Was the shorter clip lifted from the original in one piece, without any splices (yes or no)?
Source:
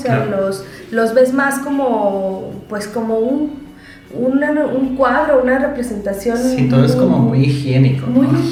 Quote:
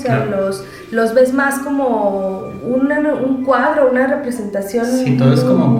no